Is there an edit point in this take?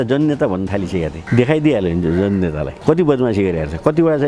yes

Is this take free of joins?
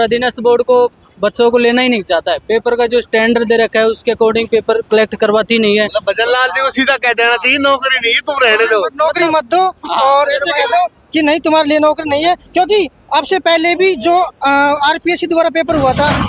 yes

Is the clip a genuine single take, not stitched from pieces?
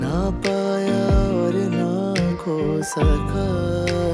yes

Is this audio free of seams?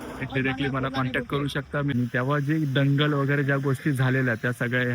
no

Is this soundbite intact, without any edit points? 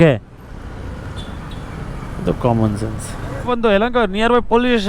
no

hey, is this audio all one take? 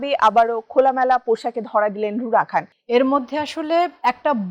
no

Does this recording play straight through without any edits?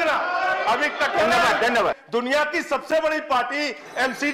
no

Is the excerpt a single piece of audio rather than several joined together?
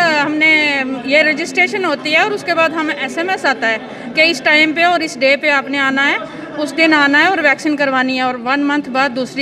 yes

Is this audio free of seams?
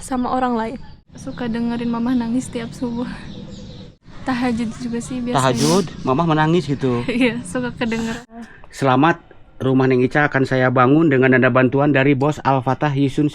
no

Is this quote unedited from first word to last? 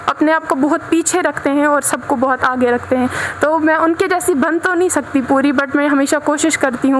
yes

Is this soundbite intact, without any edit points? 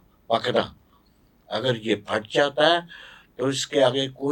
yes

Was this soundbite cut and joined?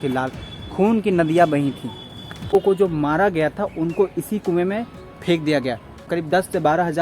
yes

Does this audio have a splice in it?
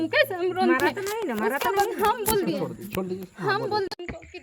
no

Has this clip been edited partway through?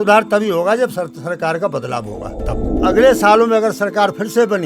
yes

